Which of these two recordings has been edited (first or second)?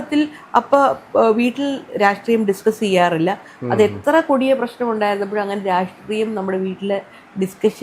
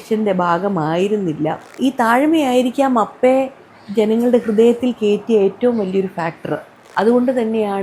second